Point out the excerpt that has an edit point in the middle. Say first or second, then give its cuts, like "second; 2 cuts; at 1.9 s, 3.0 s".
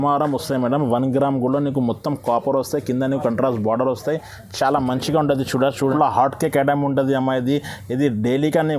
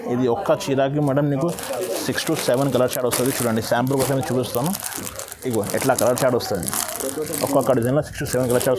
first; 1 cut; at 5.9 s